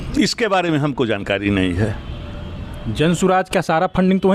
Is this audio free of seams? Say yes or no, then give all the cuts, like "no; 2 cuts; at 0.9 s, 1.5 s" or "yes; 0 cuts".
yes; 0 cuts